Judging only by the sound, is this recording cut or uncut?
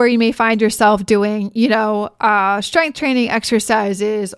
uncut